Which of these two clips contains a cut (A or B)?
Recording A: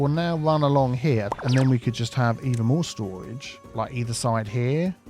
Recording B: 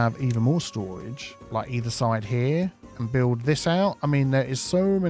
A